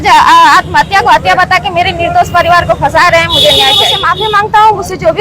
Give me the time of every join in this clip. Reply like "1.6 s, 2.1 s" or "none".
2.9 s, 4.0 s